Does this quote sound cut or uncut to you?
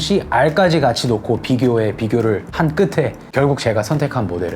cut